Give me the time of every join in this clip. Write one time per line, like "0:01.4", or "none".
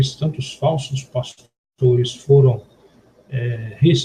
0:02.0